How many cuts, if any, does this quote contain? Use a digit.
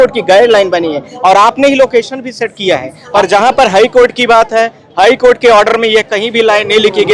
1